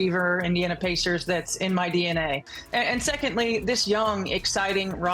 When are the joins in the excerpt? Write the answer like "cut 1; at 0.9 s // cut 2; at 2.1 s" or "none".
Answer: cut 1; at 2.5 s